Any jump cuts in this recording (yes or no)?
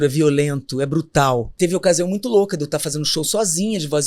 yes